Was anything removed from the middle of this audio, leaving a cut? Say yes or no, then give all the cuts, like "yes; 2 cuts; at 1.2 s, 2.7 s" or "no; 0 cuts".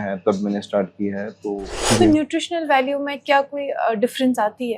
yes; 1 cut; at 1.8 s